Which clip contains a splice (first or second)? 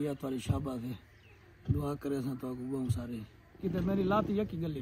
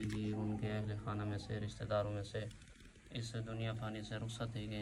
first